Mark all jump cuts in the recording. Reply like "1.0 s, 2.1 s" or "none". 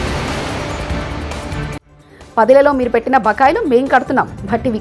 1.9 s